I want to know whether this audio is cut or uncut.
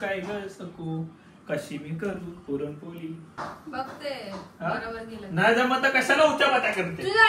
cut